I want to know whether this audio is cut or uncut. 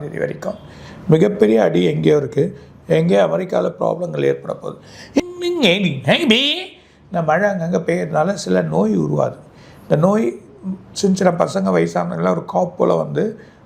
cut